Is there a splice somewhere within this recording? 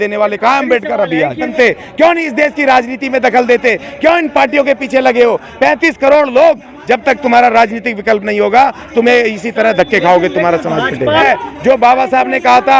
yes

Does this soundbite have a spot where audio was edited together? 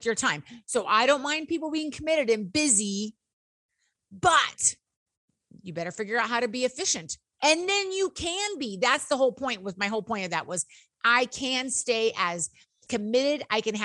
yes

